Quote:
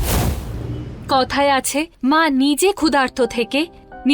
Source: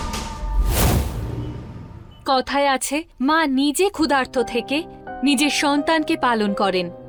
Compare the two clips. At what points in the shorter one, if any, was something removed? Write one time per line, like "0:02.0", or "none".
0:00.9